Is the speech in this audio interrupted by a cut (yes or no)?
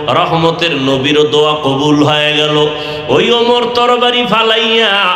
no